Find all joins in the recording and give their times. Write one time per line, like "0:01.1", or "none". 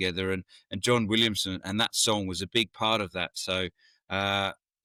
none